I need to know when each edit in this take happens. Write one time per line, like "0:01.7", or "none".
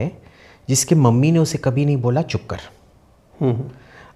none